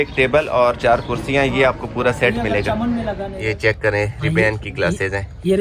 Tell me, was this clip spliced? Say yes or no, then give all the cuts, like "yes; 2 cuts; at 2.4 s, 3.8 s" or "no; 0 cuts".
yes; 1 cut; at 3.3 s